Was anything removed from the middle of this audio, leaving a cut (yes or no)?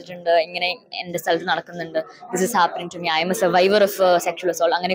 no